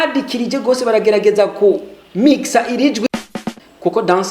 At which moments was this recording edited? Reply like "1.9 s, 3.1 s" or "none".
3.1 s